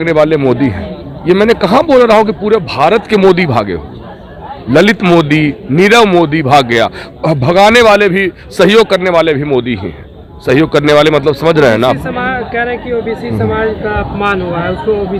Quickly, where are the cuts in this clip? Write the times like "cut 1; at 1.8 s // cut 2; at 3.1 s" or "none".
none